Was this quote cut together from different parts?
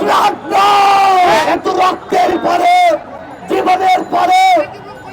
yes; 1 cut; at 1.4 s

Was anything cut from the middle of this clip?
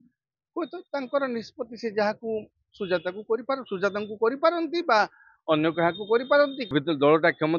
yes; 1 cut; at 6.7 s

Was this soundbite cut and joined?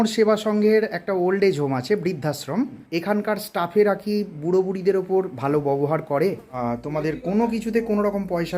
yes; 2 cuts; at 2.8 s, 6.6 s

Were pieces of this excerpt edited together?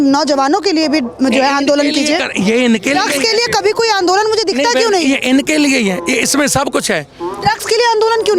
no; 0 cuts

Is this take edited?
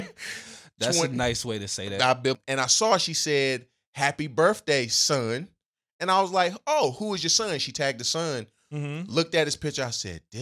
yes; 1 cut; at 2.4 s

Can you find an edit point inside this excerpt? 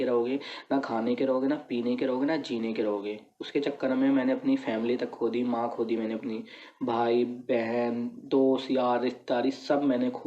no; 0 cuts

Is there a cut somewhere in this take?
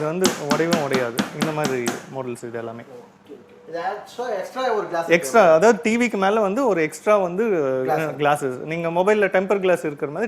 no; 0 cuts

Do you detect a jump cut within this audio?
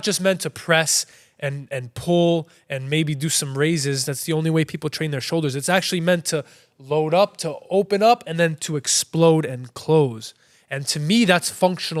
no; 0 cuts

